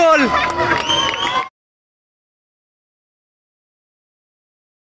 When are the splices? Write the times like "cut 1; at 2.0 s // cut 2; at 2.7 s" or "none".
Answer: none